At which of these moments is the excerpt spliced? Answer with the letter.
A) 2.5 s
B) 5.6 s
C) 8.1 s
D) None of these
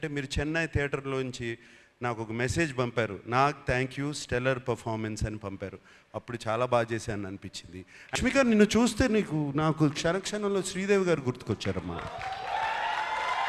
C